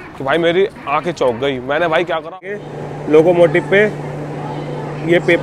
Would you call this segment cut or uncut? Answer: cut